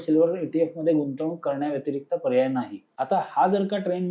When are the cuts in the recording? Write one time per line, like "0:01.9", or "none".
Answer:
0:02.8